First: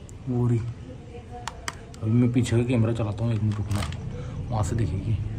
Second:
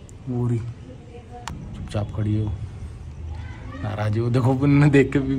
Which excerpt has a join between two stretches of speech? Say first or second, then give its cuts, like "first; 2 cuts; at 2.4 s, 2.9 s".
second; 1 cut; at 1.5 s